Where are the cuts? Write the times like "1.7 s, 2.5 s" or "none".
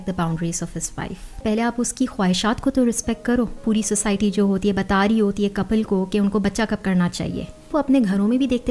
1.4 s, 3.6 s, 7.7 s